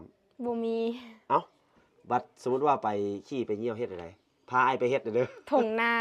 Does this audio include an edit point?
no; 0 cuts

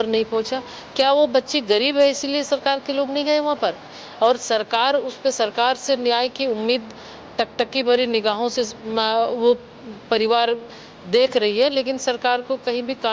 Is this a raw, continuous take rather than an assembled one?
no; 1 cut; at 3.9 s

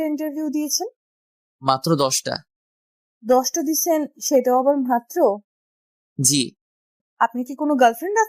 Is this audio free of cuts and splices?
no; 1 cut; at 7.0 s

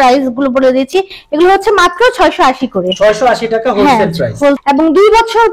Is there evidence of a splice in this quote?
yes; 1 cut; at 4.6 s

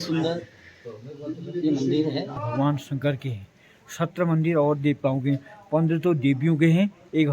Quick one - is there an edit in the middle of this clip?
yes; 1 cut; at 2.4 s

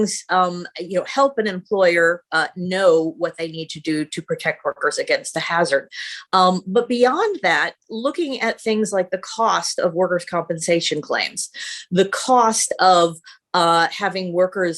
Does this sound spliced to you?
no; 0 cuts

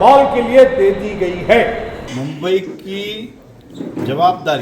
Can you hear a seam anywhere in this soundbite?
yes; 1 cut; at 2.1 s

